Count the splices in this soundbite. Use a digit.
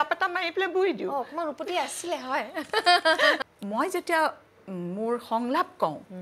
1